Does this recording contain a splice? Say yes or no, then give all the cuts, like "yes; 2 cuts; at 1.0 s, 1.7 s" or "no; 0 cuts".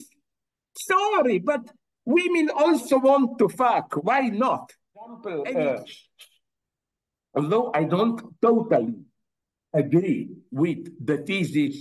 yes; 1 cut; at 5.2 s